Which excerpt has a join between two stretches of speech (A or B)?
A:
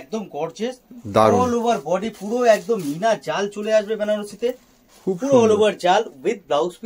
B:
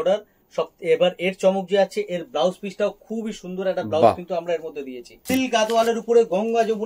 B